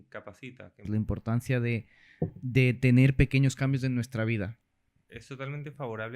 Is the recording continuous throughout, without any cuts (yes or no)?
no